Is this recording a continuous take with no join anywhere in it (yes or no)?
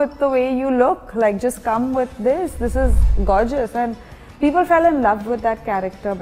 yes